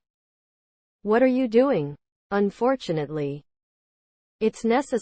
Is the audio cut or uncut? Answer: cut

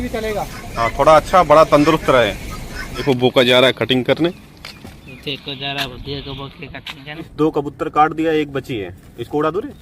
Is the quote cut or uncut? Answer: cut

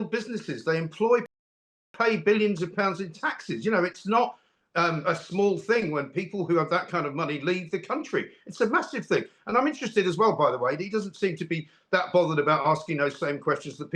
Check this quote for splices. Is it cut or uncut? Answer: uncut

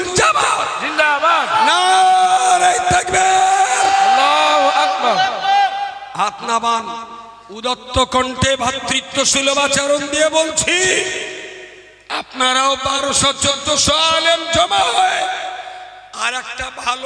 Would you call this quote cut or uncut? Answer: uncut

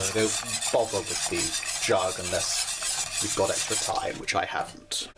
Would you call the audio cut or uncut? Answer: uncut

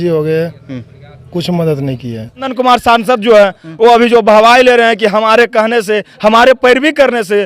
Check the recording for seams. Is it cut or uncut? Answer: cut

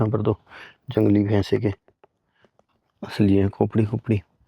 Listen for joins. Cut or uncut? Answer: uncut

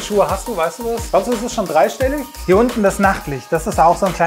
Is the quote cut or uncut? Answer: cut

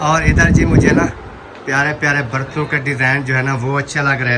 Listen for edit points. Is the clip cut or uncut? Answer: uncut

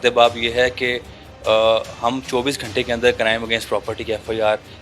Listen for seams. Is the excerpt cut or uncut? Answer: uncut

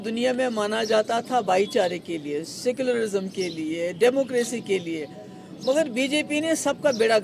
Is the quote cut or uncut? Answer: uncut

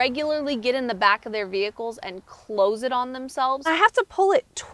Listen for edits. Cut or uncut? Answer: cut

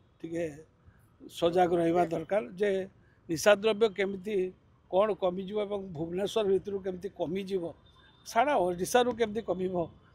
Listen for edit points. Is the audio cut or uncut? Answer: uncut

